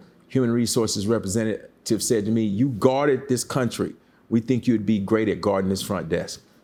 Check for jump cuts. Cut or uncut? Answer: uncut